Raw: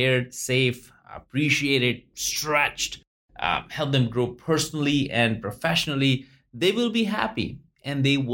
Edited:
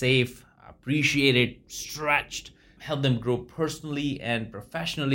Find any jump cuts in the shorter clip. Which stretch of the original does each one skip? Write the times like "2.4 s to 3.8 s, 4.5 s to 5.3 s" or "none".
3.2 s to 3.7 s